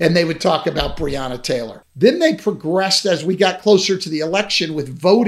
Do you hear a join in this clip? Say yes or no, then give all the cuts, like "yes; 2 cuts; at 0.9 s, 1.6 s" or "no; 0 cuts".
yes; 1 cut; at 1.8 s